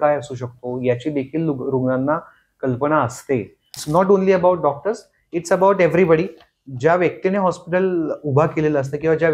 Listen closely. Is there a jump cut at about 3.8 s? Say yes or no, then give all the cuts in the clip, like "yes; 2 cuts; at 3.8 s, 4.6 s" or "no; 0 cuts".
yes; 1 cut; at 3.8 s